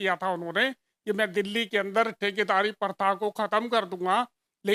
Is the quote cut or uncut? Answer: uncut